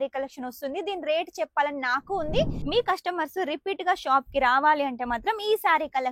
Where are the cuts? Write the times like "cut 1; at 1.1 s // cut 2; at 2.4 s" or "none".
cut 1; at 2.6 s